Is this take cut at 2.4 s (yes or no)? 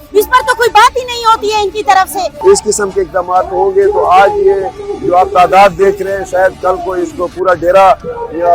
yes